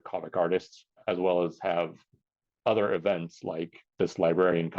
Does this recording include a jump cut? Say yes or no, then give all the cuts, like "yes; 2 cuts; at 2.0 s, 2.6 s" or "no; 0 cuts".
yes; 2 cuts; at 1.0 s, 3.8 s